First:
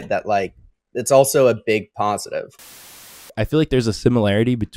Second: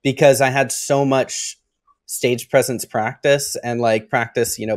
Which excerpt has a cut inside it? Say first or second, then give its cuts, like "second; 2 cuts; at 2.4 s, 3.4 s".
first; 1 cut; at 3.1 s